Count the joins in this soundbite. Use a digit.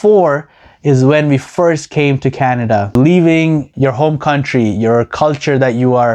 2